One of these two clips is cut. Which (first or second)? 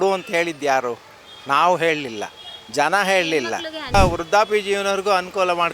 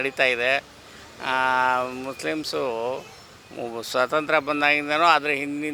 first